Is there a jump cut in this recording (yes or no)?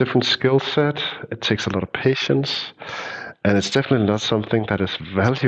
no